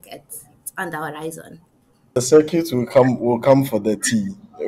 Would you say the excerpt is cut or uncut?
cut